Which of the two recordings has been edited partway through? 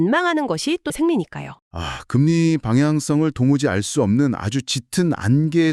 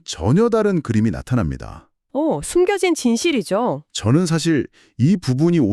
first; 1 cut; at 0.9 s

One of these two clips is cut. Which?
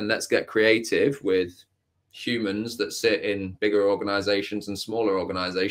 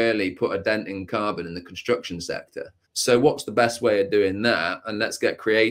second; 1 cut; at 2.8 s

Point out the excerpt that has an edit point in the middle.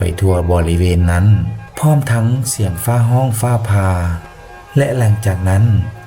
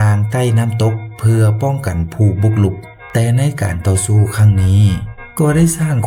second; 1 cut; at 2.9 s

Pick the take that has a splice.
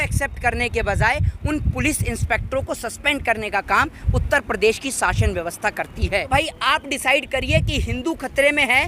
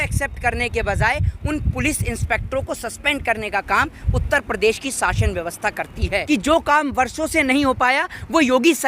second; 1 cut; at 6.2 s

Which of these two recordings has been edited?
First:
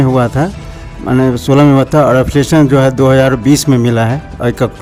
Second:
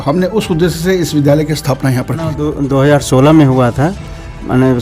second; 1 cut; at 2.2 s

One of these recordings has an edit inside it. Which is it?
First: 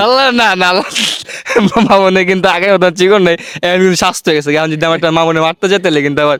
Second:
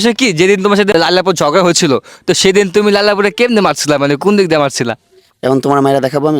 second; 1 cut; at 0.9 s

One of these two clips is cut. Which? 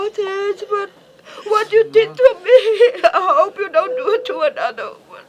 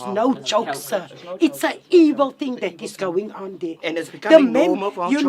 second; 1 cut; at 2.2 s

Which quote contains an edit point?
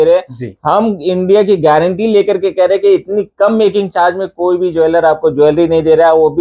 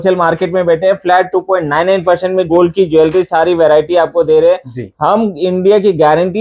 second; 1 cut; at 2.5 s

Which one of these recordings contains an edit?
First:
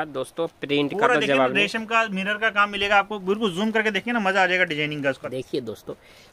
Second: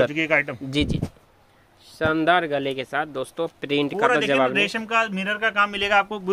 first; 1 cut; at 5.2 s

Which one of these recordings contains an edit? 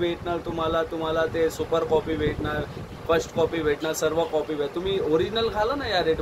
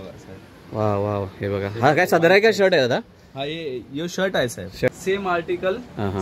second; 1 cut; at 4.9 s

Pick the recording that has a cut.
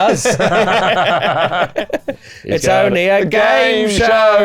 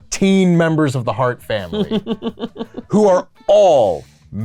first; 1 cut; at 1.8 s

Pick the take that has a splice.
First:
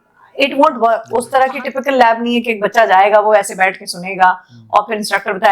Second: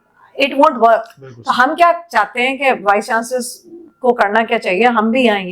first; 1 cut; at 1.1 s

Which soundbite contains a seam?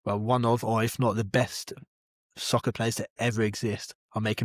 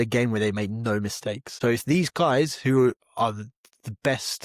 second; 1 cut; at 1.5 s

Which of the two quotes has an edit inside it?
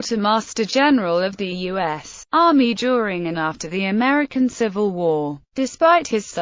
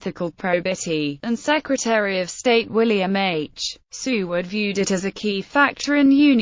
second; 1 cut; at 4.4 s

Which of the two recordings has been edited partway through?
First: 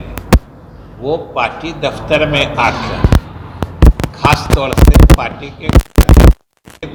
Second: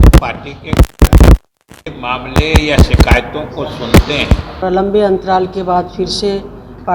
second; 1 cut; at 4.5 s

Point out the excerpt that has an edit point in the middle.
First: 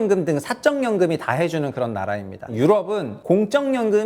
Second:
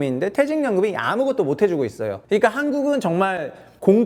first; 2 cuts; at 2.5 s, 3.1 s

